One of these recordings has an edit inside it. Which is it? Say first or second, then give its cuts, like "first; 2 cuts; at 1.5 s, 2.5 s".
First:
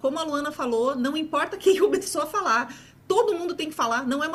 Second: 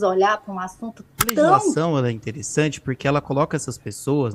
second; 1 cut; at 1.8 s